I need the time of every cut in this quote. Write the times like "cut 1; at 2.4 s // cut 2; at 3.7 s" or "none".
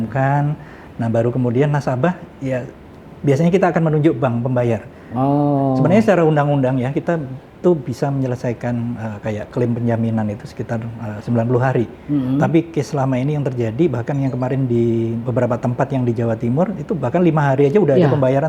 none